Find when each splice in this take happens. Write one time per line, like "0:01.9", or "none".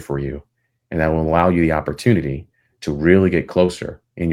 none